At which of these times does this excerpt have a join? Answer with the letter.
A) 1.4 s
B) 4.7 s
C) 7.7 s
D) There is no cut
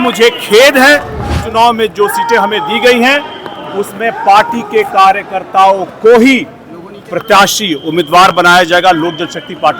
A